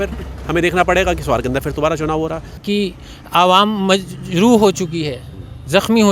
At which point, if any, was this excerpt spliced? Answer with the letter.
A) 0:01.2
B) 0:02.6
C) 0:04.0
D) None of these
B